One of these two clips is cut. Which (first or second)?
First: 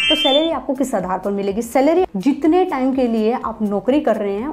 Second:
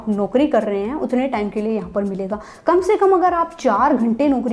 first